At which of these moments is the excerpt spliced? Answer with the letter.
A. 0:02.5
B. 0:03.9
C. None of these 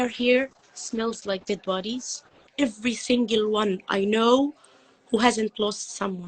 A